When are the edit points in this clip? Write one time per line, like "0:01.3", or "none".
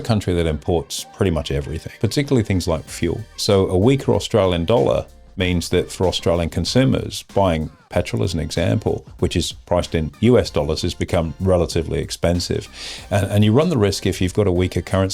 0:01.0
0:01.8
0:03.3

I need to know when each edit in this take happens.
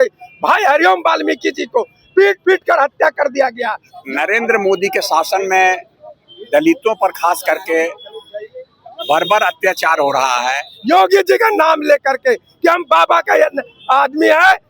0:03.9
0:10.6

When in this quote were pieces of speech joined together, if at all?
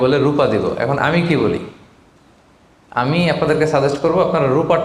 none

